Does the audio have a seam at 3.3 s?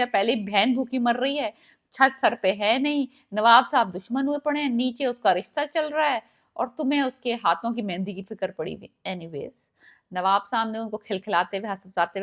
no; 0 cuts

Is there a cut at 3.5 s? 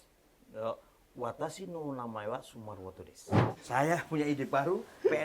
yes; 1 cut; at 3.5 s

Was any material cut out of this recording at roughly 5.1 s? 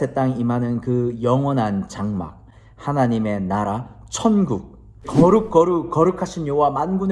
yes; 1 cut; at 5.1 s

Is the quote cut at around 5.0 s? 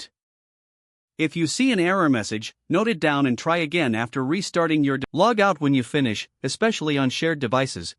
yes; 1 cut; at 5.0 s

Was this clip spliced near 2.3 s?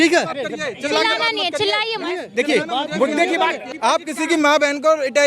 no; 1 cut; at 3.7 s

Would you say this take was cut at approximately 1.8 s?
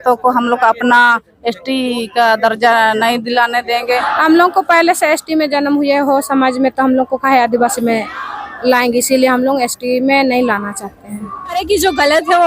no; 2 cuts; at 4.0 s, 11.6 s

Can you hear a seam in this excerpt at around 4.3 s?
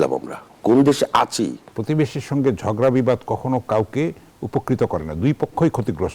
no; 1 cut; at 1.7 s

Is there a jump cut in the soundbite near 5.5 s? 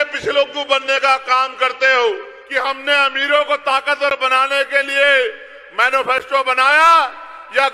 no; 1 cut; at 2.4 s

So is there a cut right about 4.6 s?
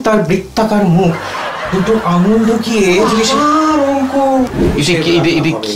yes; 1 cut; at 4.6 s

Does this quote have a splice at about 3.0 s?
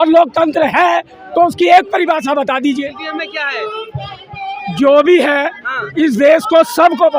yes; 1 cut; at 3.0 s

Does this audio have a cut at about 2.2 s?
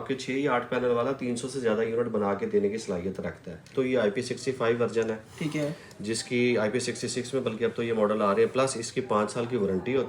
no; 1 cut; at 3.7 s

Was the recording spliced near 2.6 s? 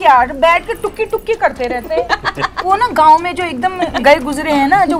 yes; 2 cuts; at 2.6 s, 4.0 s

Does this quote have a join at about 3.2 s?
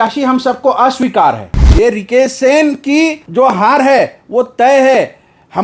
yes; 2 cuts; at 1.6 s, 3.2 s

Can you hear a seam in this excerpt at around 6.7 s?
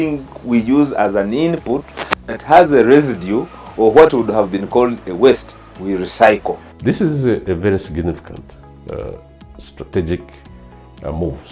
yes; 1 cut; at 6.7 s

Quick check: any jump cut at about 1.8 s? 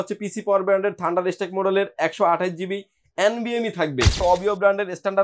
no; 1 cut; at 4.2 s

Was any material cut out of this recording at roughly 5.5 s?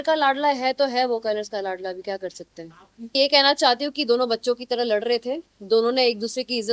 no; 1 cut; at 3.1 s

